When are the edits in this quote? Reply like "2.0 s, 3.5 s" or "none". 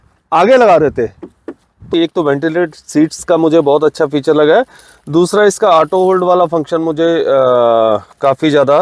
1.9 s

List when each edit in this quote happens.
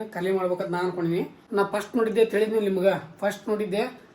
1.4 s

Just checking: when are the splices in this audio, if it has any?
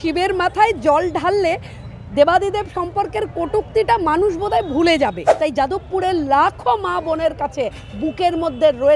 5.2 s

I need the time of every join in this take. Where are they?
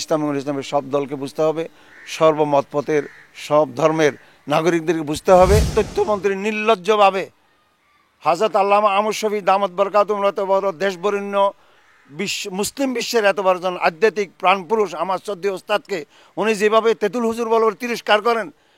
5.7 s

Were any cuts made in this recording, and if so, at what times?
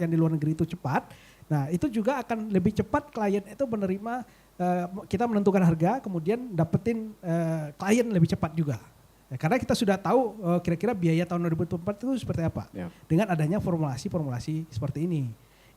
none

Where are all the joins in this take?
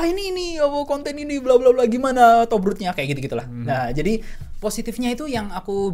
4.3 s

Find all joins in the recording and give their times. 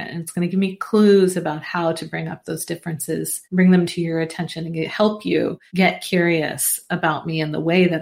3.4 s, 5.6 s

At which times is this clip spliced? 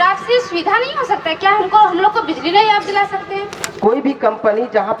3.6 s

